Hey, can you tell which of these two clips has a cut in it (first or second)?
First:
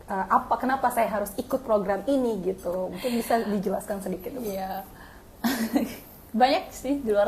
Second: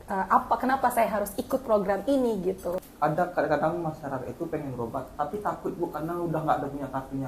second